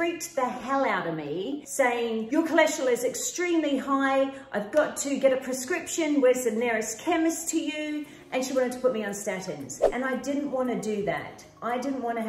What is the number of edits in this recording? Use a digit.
2